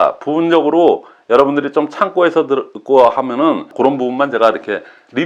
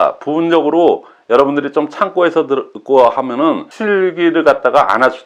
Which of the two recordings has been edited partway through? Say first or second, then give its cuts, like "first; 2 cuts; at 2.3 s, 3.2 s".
first; 1 cut; at 3.7 s